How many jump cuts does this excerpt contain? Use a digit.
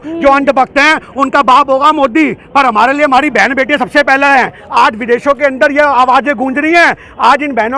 1